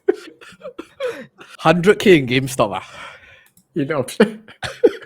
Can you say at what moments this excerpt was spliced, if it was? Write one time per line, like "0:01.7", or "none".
0:01.4